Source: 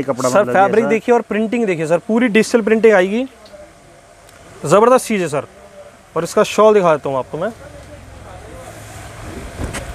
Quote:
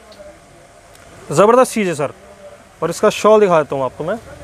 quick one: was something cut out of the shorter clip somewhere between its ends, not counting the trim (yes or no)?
no